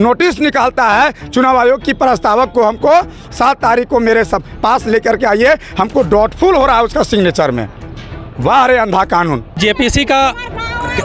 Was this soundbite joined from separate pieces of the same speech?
yes; 1 cut; at 9.6 s

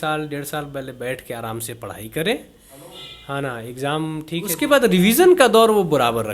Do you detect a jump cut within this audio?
yes; 1 cut; at 4.5 s

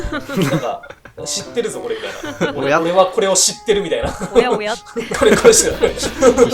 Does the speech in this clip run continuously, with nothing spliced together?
no; 1 cut; at 5.0 s

